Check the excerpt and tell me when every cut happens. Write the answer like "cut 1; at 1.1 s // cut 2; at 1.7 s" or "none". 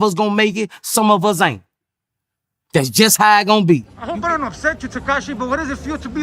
cut 1; at 4.0 s